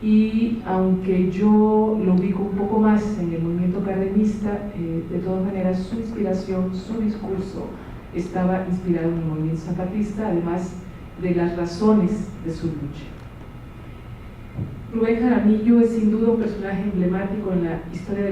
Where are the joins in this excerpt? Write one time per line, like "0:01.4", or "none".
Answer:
0:07.3